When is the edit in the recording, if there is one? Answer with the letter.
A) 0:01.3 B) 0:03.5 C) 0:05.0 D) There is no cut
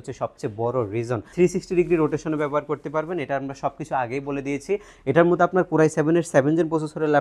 A